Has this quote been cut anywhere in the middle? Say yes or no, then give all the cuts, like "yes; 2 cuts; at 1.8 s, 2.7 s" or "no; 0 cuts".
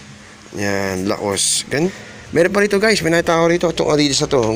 yes; 1 cut; at 1.9 s